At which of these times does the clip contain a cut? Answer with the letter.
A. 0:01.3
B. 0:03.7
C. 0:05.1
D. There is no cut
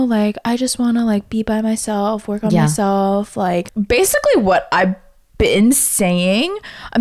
B